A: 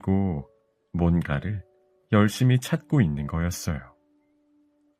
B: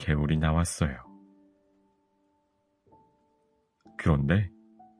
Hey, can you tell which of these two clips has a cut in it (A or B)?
B